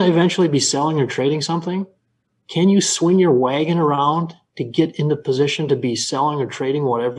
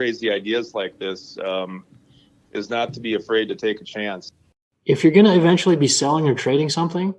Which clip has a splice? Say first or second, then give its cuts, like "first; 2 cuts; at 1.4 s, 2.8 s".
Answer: second; 1 cut; at 4.3 s